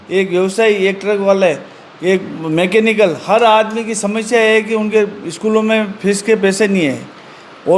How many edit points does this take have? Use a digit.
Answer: 0